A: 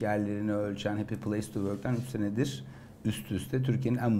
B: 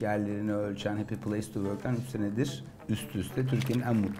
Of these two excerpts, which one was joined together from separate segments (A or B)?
B